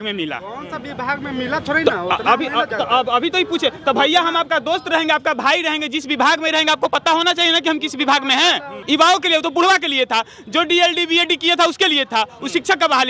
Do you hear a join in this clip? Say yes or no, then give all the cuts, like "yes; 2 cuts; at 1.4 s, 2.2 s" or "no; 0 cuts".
yes; 1 cut; at 8.7 s